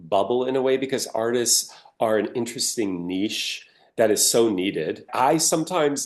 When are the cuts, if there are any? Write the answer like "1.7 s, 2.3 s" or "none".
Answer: 5.1 s